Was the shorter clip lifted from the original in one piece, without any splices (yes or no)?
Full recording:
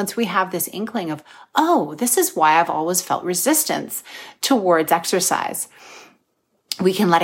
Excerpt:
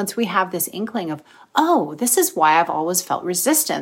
yes